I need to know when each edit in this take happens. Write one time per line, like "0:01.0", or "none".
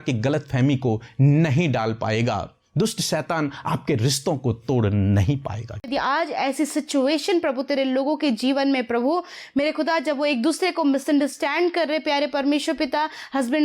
0:05.9